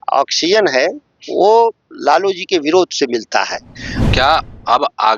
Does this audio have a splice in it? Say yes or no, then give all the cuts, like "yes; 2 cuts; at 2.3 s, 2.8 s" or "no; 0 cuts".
yes; 1 cut; at 3.9 s